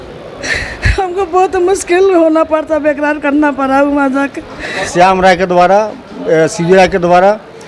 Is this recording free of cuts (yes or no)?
no